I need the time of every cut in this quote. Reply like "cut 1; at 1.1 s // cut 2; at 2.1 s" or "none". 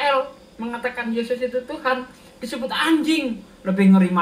none